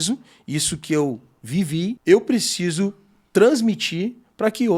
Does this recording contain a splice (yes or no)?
yes